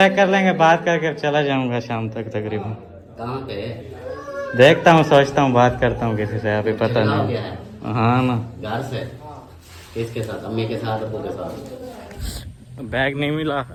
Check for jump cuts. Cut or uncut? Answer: uncut